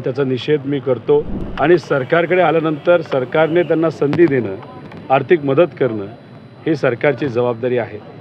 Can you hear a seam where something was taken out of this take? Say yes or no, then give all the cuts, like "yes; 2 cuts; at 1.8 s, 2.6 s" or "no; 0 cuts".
yes; 1 cut; at 1.4 s